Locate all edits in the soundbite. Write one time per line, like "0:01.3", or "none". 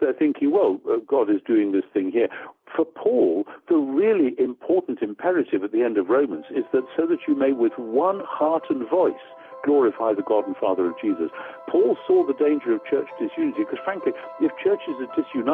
none